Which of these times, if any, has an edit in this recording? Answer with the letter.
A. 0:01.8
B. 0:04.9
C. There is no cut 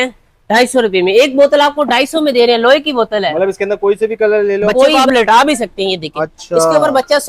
B